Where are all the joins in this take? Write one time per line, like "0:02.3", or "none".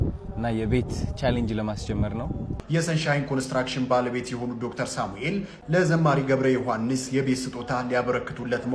0:02.5